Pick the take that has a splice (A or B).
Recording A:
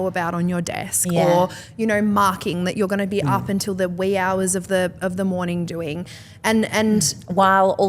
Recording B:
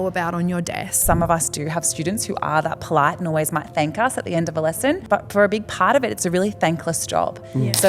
B